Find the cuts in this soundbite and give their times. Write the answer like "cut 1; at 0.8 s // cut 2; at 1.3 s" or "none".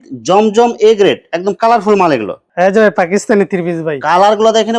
cut 1; at 2.4 s